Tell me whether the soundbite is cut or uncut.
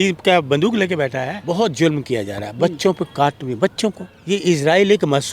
cut